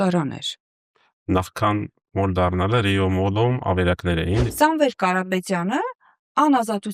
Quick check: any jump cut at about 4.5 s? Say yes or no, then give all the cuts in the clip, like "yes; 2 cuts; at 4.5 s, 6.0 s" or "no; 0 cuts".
yes; 1 cut; at 4.5 s